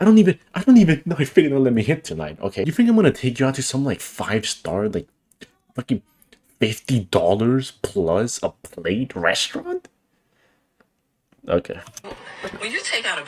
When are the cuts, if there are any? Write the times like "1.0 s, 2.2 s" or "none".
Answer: 2.6 s